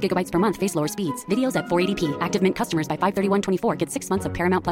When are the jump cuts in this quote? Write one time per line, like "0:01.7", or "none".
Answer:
none